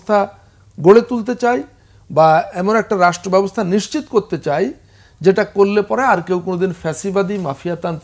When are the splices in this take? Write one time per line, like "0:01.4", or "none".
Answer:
none